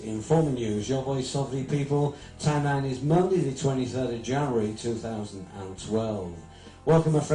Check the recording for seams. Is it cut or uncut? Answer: cut